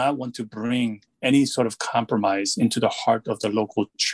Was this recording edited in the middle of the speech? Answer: no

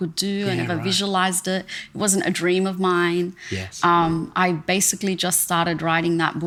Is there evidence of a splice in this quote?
no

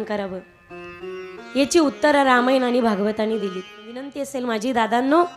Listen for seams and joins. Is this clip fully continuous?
no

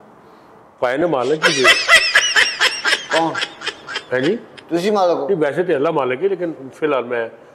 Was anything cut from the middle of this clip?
no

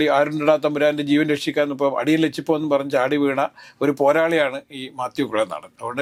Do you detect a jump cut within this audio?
no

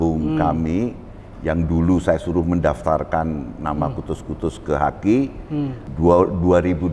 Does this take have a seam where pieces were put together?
yes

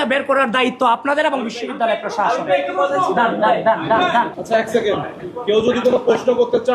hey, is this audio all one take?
no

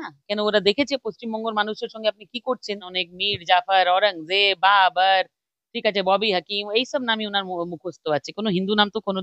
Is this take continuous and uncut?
no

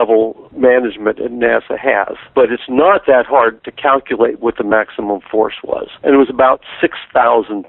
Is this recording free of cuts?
no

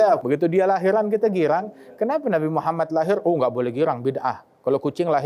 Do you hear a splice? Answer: no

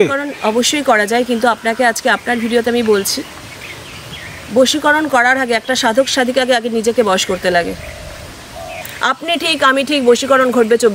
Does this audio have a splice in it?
yes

